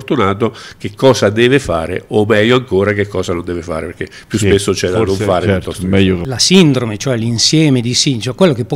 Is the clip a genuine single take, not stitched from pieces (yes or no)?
no